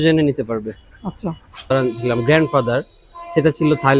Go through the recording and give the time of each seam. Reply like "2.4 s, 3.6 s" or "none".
1.7 s